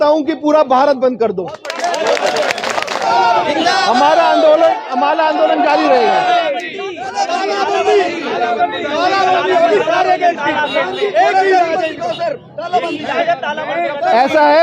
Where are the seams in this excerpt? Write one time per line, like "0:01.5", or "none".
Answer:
0:03.0